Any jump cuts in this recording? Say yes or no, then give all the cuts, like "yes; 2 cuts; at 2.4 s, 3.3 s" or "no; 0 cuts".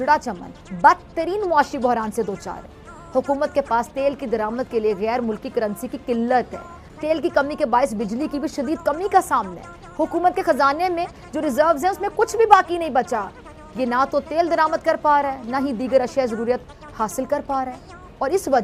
no; 0 cuts